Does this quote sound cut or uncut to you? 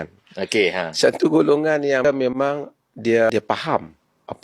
cut